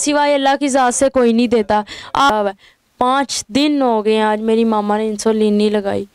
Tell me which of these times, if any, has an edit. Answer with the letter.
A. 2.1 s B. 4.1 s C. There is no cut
A